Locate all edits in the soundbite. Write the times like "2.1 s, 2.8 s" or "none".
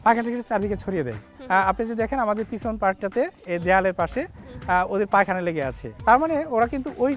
none

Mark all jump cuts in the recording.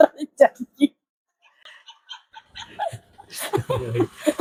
none

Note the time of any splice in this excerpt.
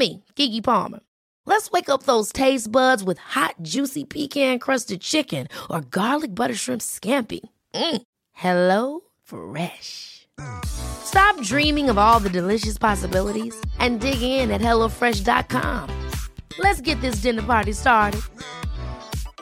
none

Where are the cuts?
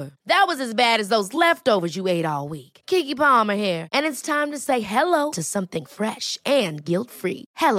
none

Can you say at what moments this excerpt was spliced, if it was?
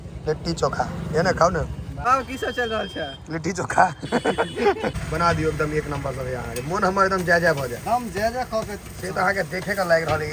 1.9 s, 5.0 s

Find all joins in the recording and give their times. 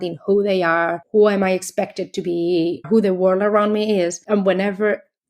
1.0 s, 2.8 s, 4.2 s

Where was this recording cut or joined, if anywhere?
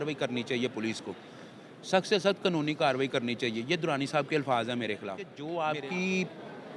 5.3 s

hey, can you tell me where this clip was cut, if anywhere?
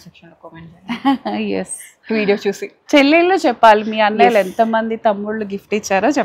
none

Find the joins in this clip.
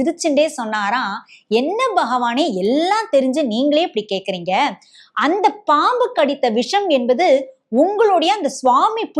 none

